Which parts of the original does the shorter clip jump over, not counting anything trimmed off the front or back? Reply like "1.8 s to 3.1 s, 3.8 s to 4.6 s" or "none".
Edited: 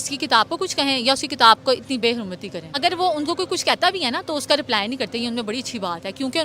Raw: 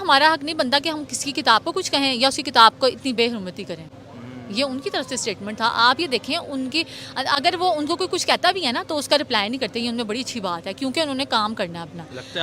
3.9 s to 7.4 s